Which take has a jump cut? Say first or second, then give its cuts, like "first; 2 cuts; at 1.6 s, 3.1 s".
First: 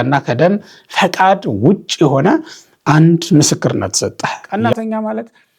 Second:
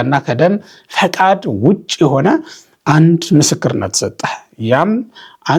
first; 1 cut; at 4.4 s